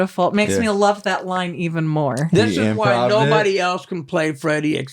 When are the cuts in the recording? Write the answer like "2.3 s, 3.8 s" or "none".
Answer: none